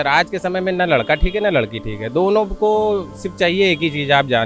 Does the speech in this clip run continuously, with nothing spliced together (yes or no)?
yes